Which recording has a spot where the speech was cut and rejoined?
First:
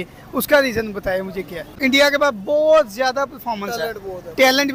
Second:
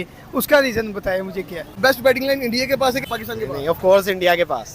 second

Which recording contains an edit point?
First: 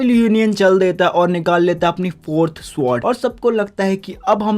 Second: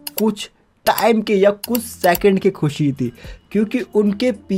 first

